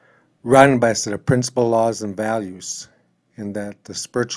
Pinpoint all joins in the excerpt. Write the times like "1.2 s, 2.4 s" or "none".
none